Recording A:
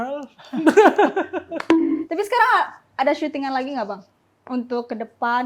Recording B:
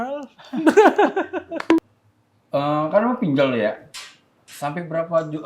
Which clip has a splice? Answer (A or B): B